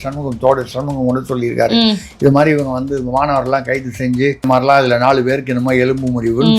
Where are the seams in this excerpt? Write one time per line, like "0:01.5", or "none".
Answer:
0:04.4